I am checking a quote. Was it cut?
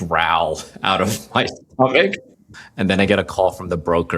yes; 1 cut; at 2.3 s

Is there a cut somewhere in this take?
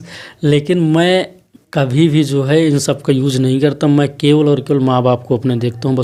no; 0 cuts

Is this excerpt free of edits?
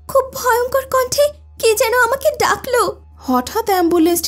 no; 1 cut; at 3.1 s

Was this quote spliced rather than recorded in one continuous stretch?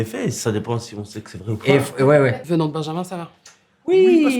yes; 1 cut; at 2.4 s

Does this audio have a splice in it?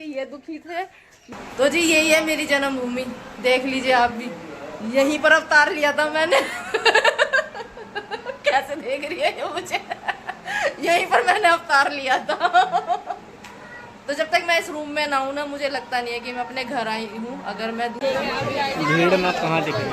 yes; 2 cuts; at 1.3 s, 18.0 s

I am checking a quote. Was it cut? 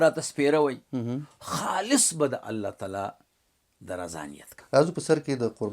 yes; 1 cut; at 4.5 s

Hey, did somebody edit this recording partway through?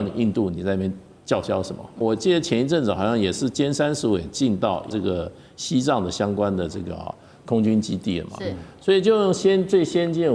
yes; 2 cuts; at 1.9 s, 4.9 s

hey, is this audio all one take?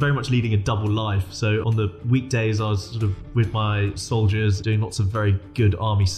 no; 2 cuts; at 1.7 s, 4.6 s

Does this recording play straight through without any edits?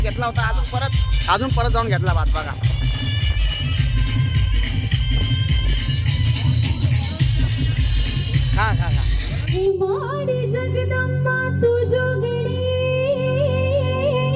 no; 1 cut; at 9.6 s

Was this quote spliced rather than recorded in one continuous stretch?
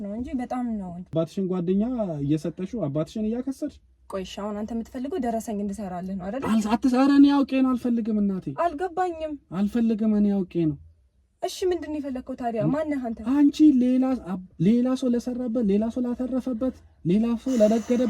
yes; 1 cut; at 1.1 s

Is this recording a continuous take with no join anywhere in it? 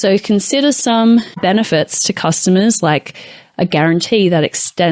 no; 1 cut; at 1.3 s

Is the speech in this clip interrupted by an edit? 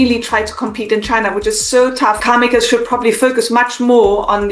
no; 0 cuts

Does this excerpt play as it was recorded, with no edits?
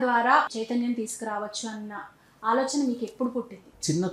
yes; 0 cuts

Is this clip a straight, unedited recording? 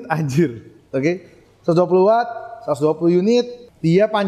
yes; 0 cuts

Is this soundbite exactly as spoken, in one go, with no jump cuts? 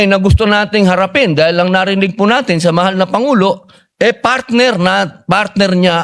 yes; 0 cuts

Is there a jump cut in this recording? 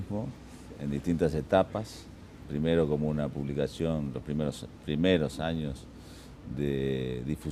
yes; 1 cut; at 2.8 s

